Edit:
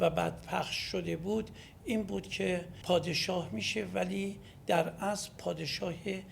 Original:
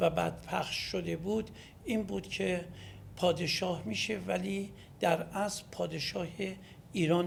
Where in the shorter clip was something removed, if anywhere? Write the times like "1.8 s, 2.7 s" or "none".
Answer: 2.7 s